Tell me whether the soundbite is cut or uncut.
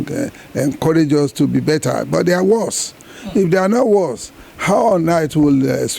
uncut